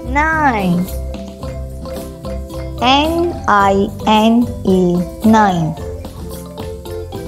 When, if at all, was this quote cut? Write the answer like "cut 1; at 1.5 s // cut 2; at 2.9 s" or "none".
none